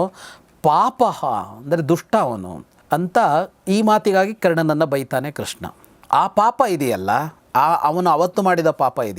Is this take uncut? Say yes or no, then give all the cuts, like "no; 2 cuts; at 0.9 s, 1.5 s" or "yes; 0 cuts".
yes; 0 cuts